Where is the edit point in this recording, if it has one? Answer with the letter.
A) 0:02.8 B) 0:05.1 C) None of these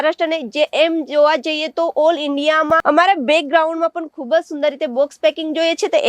A